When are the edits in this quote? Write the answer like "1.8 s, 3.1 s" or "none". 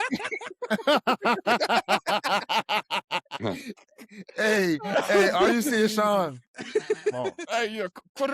3.3 s, 7.4 s